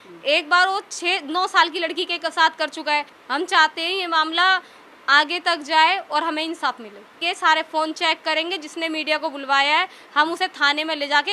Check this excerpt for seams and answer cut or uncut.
cut